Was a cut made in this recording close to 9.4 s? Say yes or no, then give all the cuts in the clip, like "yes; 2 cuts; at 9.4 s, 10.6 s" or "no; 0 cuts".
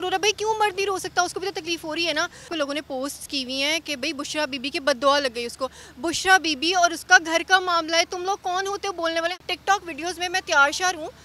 yes; 2 cuts; at 2.4 s, 9.4 s